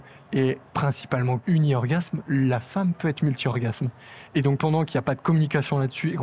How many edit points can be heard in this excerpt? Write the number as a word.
two